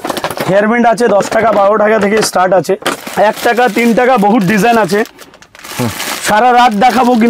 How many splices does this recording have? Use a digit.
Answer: 1